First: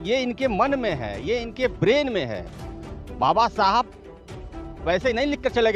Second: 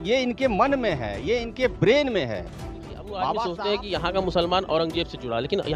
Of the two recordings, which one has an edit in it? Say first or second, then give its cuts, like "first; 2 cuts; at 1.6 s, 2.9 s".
second; 1 cut; at 3.2 s